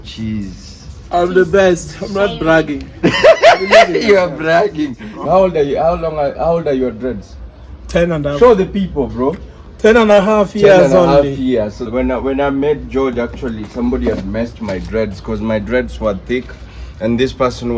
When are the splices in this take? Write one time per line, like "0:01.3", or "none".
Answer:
0:05.2
0:11.8